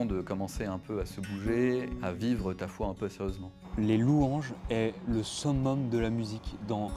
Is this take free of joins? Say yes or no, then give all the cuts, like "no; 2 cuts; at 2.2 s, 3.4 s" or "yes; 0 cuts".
no; 2 cuts; at 1.9 s, 3.6 s